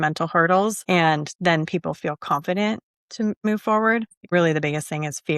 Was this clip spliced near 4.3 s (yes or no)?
yes